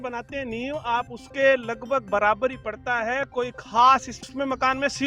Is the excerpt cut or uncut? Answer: cut